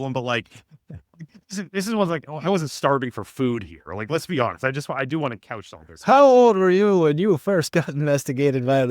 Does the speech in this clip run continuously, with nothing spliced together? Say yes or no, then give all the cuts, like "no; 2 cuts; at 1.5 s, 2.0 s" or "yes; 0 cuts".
yes; 0 cuts